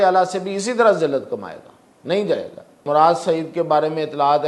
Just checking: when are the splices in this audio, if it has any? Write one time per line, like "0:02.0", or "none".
0:02.8